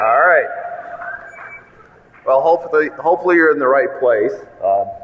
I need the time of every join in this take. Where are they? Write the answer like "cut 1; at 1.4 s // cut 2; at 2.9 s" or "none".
none